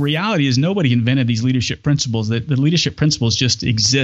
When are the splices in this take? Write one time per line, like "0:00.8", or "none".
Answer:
none